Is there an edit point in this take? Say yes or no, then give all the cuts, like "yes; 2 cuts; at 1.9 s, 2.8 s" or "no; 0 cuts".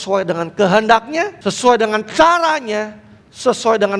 yes; 1 cut; at 1.3 s